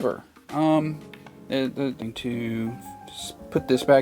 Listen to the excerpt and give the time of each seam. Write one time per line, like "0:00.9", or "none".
0:02.0